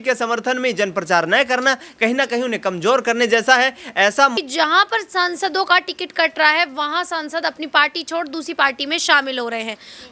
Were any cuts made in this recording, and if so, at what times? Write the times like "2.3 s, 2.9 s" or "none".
4.4 s